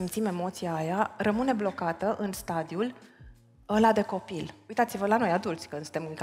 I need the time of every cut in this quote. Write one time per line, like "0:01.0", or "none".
0:04.6